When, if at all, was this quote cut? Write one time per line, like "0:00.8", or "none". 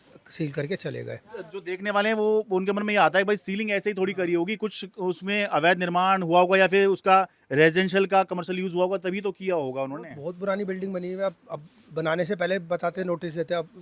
none